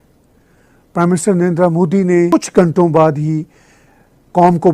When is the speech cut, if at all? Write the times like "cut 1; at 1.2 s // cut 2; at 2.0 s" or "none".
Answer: cut 1; at 2.3 s